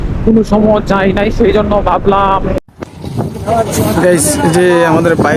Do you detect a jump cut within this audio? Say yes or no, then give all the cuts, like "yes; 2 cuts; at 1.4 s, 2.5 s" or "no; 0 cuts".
yes; 1 cut; at 2.7 s